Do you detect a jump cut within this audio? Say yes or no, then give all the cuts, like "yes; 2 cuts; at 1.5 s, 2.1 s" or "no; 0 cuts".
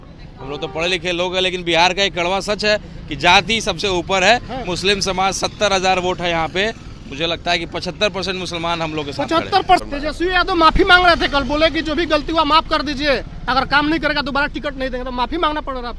yes; 1 cut; at 9.8 s